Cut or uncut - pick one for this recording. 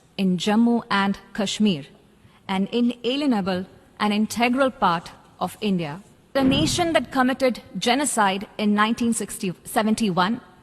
cut